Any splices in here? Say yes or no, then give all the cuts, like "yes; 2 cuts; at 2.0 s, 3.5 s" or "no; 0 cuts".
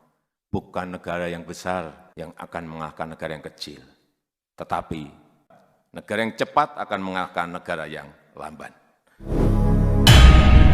yes; 1 cut; at 9.3 s